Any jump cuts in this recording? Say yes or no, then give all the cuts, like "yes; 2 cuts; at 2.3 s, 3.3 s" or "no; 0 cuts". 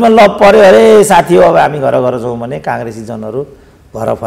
no; 0 cuts